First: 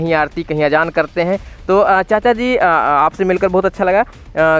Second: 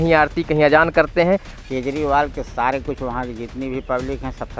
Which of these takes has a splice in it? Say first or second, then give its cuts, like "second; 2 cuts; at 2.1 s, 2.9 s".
second; 1 cut; at 1.5 s